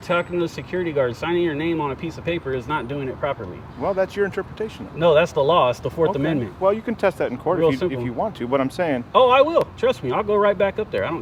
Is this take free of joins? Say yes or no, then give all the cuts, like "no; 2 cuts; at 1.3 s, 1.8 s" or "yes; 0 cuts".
yes; 0 cuts